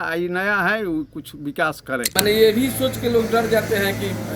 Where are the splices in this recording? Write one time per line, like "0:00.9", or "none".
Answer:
0:02.1